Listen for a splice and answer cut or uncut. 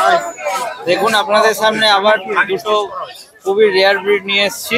uncut